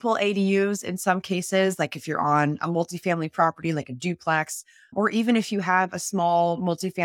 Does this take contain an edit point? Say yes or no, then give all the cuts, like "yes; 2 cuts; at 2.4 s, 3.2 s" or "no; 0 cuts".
no; 0 cuts